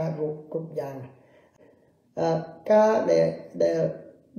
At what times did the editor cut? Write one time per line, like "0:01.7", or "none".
0:01.4